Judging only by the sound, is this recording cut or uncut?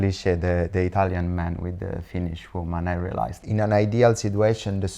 cut